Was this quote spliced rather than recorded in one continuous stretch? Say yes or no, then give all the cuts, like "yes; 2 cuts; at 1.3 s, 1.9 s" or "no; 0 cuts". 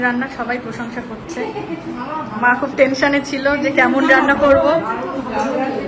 no; 0 cuts